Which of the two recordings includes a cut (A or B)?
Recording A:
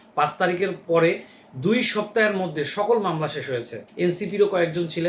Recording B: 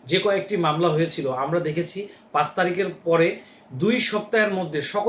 A